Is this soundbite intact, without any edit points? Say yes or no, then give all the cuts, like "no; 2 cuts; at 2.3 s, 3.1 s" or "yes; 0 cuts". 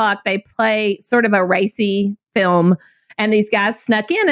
no; 1 cut; at 2.2 s